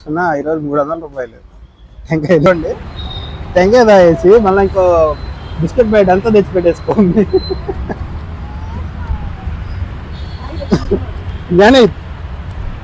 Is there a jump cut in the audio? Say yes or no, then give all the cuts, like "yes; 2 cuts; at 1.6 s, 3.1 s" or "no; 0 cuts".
yes; 1 cut; at 2.5 s